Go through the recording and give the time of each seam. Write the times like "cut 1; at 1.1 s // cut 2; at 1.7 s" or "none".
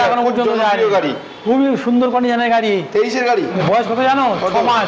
cut 1; at 1.3 s // cut 2; at 3.6 s

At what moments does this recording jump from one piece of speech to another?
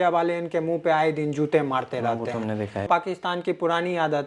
cut 1; at 2.9 s

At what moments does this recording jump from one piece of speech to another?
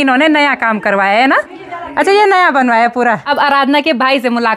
cut 1; at 3.2 s

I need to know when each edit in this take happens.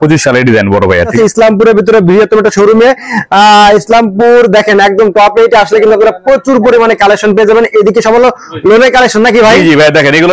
cut 1; at 1.1 s

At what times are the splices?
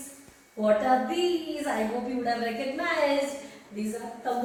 none

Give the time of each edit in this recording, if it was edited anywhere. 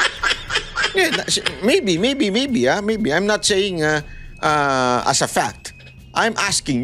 cut 1; at 0.9 s

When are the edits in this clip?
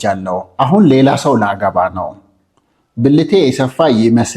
none

